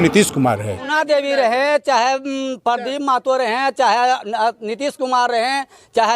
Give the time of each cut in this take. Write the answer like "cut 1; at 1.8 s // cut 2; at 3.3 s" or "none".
cut 1; at 0.9 s